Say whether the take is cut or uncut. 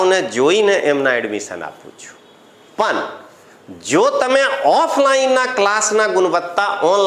uncut